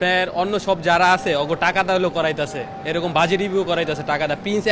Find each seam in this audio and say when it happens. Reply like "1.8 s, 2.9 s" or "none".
none

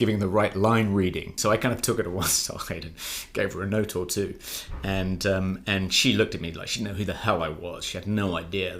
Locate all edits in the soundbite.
1.3 s

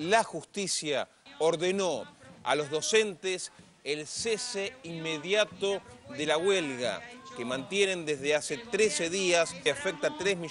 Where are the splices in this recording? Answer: 1.2 s, 9.6 s

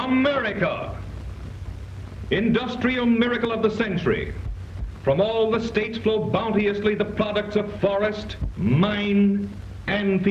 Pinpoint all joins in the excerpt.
3.7 s

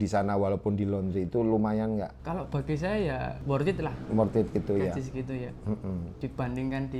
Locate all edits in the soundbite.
2.2 s, 3.4 s, 6.1 s

